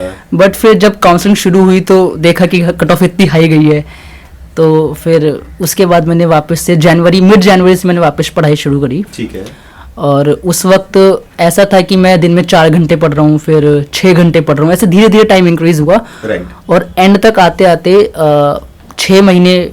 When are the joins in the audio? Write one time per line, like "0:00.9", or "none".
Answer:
none

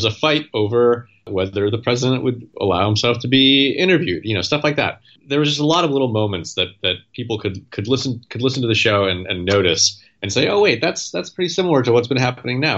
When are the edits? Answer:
0:01.3
0:02.5
0:05.1

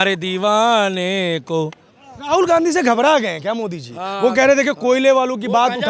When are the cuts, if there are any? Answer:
none

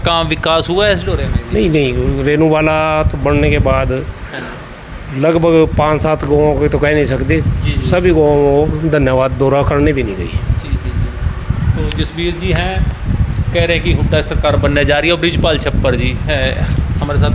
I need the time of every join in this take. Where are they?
none

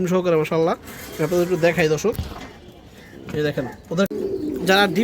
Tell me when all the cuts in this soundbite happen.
0:04.1

